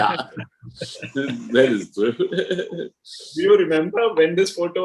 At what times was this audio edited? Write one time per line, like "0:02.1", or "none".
none